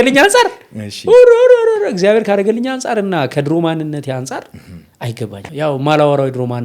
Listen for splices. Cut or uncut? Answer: cut